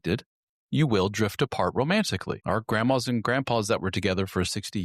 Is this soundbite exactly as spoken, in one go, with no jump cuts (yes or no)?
no